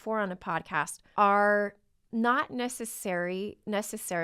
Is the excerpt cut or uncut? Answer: cut